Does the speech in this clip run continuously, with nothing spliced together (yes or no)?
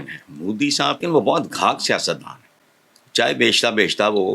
no